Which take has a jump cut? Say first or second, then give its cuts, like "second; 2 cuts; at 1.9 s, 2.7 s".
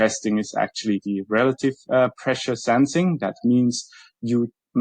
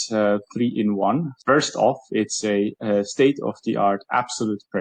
second; 1 cut; at 1.4 s